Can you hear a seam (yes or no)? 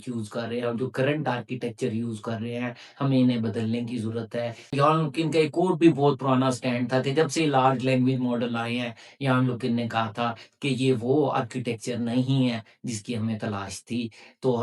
yes